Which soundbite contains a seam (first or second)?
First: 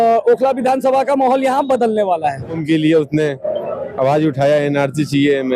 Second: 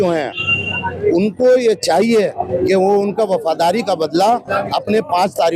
first